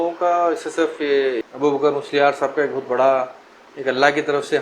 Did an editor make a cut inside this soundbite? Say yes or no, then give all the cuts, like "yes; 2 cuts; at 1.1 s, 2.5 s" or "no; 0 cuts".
no; 0 cuts